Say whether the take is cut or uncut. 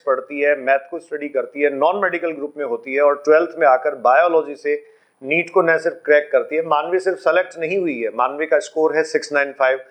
uncut